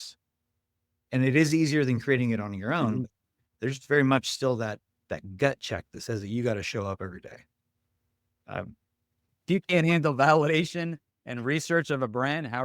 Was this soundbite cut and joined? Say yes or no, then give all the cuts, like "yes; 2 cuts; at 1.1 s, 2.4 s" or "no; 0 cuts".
yes; 1 cut; at 9.3 s